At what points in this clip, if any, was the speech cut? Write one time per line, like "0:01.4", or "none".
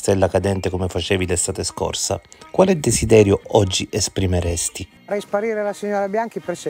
0:05.1